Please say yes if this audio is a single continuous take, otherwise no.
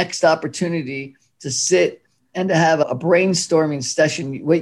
no